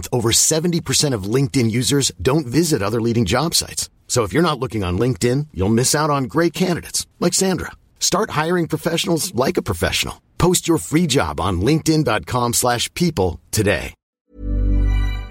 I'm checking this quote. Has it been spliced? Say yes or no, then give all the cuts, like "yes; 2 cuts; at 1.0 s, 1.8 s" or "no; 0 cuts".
yes; 1 cut; at 14.2 s